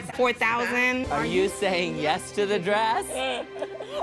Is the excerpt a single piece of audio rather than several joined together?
no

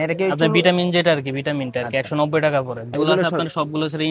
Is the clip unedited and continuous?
no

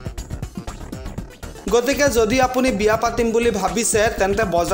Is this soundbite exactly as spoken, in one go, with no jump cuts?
no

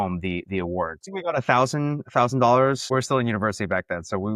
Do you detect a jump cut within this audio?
yes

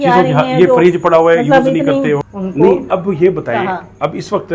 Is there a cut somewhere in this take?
yes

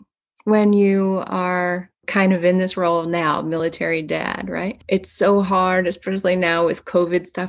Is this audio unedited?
no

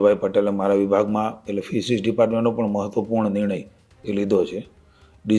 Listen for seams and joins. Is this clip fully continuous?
yes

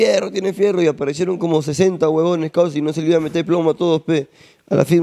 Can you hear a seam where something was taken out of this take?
no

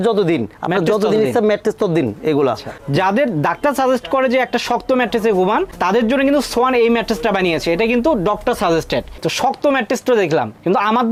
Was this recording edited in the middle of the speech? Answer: no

